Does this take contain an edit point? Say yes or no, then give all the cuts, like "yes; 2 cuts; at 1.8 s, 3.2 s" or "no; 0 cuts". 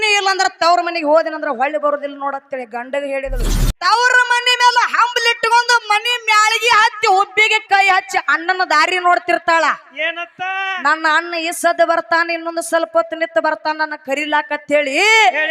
yes; 1 cut; at 3.4 s